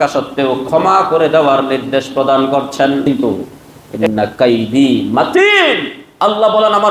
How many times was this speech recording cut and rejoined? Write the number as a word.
one